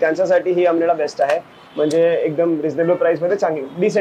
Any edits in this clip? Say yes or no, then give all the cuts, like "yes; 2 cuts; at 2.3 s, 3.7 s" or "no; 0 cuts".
no; 0 cuts